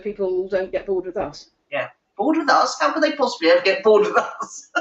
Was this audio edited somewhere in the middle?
no; 0 cuts

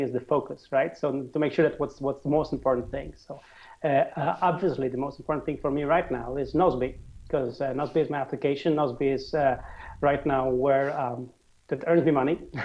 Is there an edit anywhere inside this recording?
yes; 1 cut; at 4.5 s

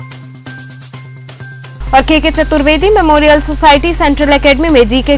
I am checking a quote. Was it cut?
yes; 1 cut; at 1.7 s

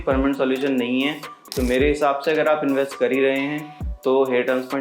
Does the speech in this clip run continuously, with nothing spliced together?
no; 1 cut; at 1.4 s

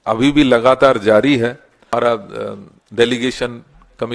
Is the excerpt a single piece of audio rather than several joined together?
no; 1 cut; at 1.9 s

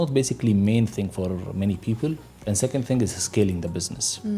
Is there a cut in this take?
no; 0 cuts

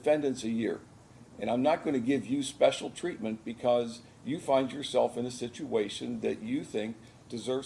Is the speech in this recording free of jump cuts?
yes; 0 cuts

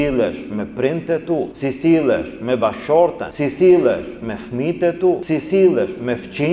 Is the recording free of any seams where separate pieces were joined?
no; 3 cuts; at 1.5 s, 3.3 s, 5.2 s

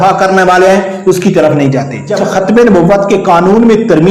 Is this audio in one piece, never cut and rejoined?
no; 1 cut; at 2.2 s

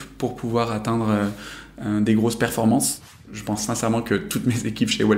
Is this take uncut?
no; 1 cut; at 3.0 s

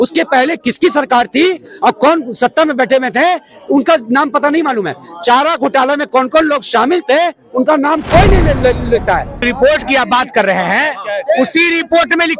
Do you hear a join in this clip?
yes; 1 cut; at 9.4 s

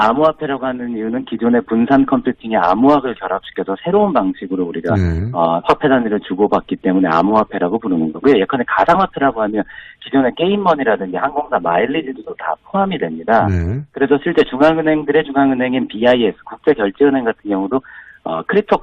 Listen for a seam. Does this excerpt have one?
no; 0 cuts

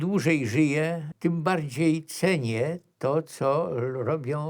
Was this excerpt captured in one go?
no; 1 cut; at 1.1 s

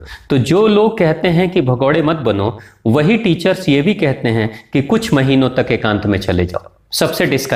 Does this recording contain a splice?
no; 0 cuts

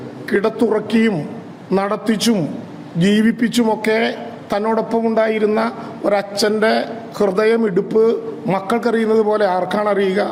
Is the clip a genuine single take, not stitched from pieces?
yes; 0 cuts

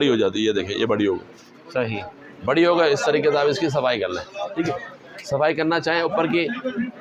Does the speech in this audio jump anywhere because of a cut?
no; 0 cuts

